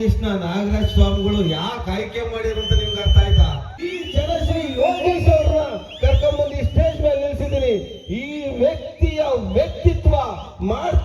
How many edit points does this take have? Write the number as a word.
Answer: one